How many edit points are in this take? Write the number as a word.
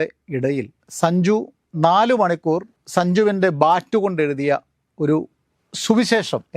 two